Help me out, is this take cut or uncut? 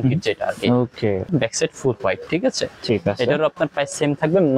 cut